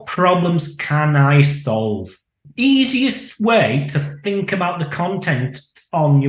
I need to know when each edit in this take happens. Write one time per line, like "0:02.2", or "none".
0:02.4